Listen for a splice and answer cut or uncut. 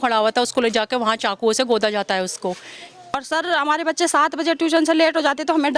cut